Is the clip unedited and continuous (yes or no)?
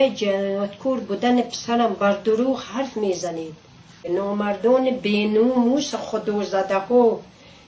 no